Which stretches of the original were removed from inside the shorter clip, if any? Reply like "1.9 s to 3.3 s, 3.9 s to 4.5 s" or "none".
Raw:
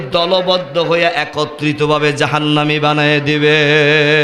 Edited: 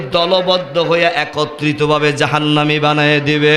none

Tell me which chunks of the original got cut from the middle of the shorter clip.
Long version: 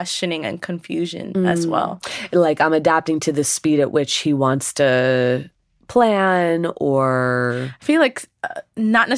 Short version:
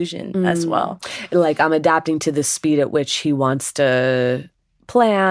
none

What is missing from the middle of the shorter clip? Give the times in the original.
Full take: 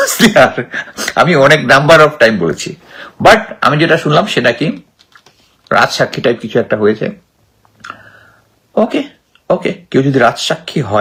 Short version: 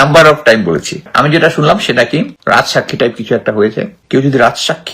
2.8 s to 3.5 s, 4.8 s to 5.6 s, 7.2 s to 9.8 s

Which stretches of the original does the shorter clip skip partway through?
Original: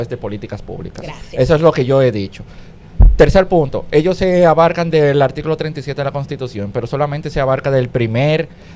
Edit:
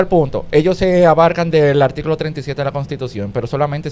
none

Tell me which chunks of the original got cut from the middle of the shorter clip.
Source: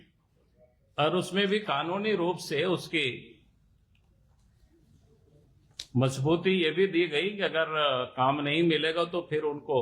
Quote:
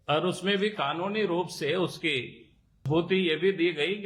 3.7 s to 6.2 s

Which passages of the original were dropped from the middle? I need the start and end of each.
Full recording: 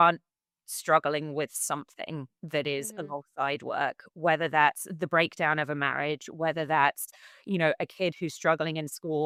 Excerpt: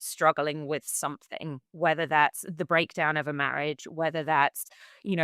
2.3 s to 4.1 s

